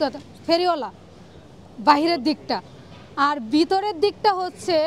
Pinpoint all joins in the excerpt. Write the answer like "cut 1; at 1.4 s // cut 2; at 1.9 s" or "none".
none